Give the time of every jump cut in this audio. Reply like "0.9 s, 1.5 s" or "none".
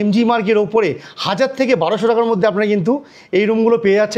none

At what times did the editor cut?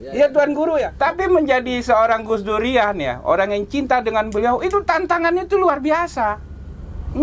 0.9 s

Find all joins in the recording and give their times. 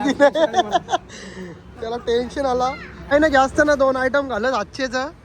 2.9 s

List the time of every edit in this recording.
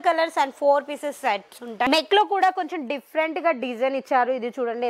1.9 s

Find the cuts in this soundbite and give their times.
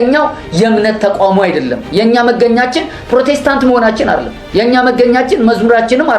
none

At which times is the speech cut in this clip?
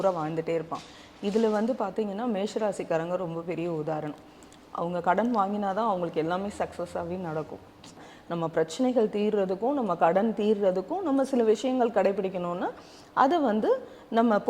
8.1 s

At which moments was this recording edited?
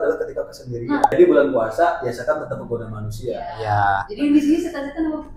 1.1 s

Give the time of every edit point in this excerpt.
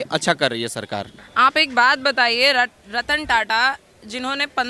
1.2 s

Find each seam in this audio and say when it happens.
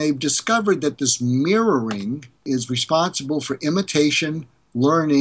2.4 s

